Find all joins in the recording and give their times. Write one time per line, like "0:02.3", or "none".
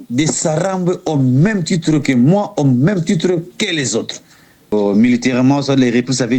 0:04.7